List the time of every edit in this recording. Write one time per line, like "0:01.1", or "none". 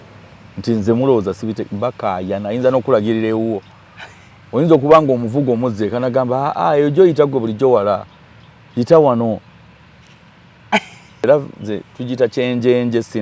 0:11.3